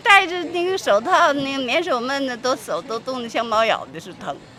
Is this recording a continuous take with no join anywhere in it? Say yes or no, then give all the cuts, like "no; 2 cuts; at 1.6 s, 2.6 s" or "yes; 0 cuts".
yes; 0 cuts